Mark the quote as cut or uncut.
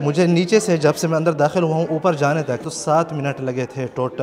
cut